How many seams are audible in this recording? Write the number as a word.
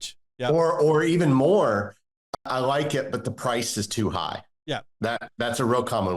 one